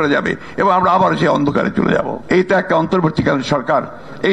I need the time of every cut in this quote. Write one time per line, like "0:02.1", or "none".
0:02.2